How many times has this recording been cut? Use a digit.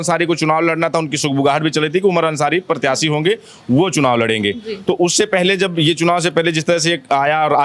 0